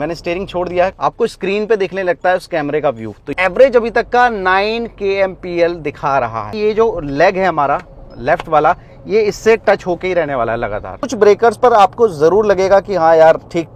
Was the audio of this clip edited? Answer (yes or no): yes